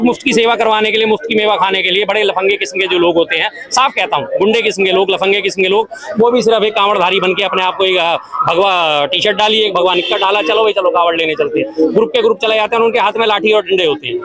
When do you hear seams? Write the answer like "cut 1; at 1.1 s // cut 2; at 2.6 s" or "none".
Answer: none